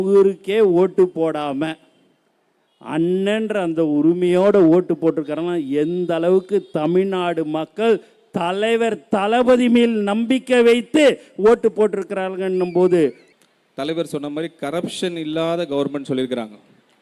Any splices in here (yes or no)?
yes